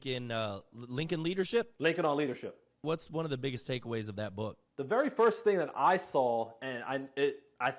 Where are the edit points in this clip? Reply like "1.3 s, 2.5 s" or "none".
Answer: 1.7 s, 2.8 s, 4.6 s